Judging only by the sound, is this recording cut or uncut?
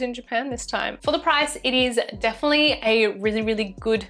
cut